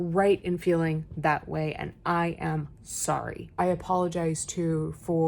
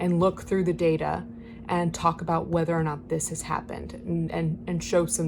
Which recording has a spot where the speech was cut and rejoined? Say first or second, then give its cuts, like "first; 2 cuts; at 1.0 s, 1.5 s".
first; 1 cut; at 3.5 s